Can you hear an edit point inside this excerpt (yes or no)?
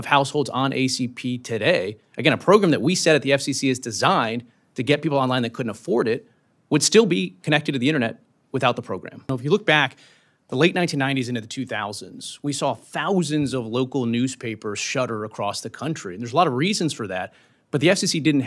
no